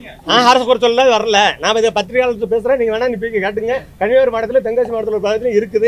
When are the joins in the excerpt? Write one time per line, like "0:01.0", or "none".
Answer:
none